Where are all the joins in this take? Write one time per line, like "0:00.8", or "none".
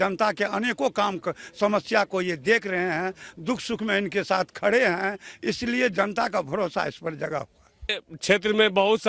0:08.0